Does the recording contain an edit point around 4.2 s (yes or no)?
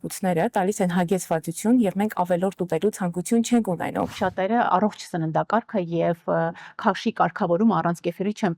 yes